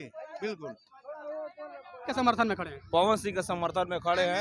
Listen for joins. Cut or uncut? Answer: cut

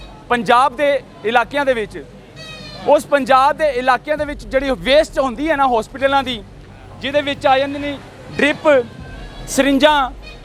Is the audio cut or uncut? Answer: uncut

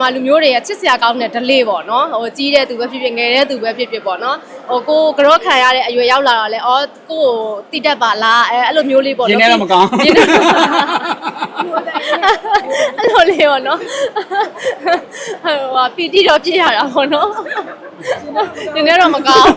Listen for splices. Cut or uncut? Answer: uncut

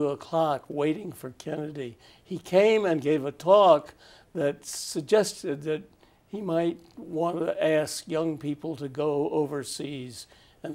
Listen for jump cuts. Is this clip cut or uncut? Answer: uncut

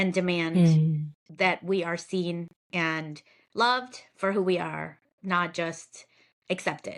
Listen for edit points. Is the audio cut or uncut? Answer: uncut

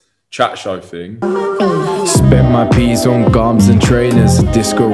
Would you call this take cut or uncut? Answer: cut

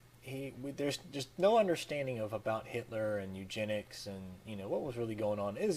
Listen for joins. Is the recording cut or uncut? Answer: cut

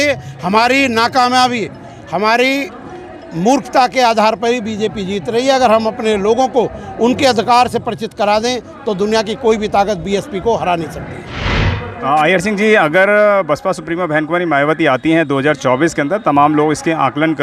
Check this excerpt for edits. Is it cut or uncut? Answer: cut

